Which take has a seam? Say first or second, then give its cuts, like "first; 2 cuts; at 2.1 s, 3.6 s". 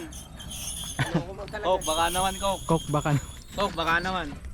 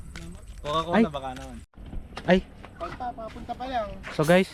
second; 1 cut; at 1.7 s